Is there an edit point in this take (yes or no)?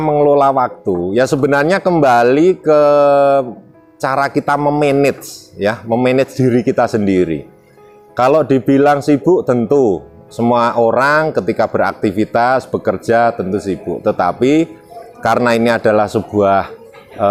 no